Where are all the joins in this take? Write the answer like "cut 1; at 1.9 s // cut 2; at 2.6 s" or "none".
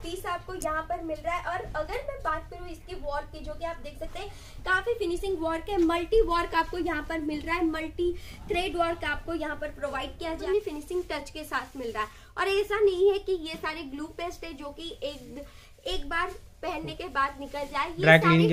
cut 1; at 10.4 s